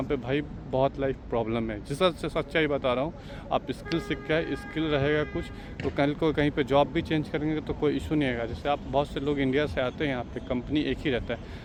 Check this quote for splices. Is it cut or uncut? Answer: uncut